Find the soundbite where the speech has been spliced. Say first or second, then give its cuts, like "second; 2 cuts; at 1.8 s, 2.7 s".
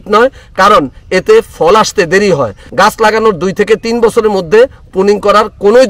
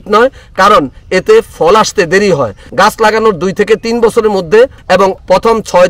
second; 1 cut; at 4.9 s